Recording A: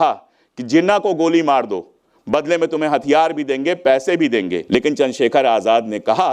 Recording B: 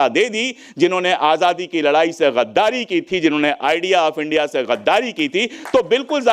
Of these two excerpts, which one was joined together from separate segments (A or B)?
A